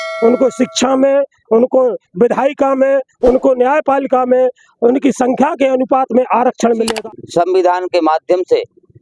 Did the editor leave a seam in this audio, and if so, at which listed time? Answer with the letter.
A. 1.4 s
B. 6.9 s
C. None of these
B